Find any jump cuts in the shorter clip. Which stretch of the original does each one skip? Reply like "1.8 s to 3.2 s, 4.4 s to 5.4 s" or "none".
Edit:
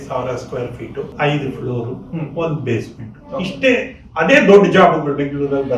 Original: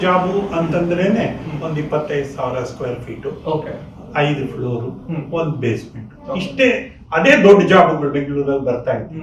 3.4 s to 4.1 s